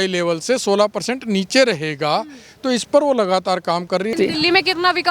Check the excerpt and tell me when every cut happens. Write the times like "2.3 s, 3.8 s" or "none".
4.1 s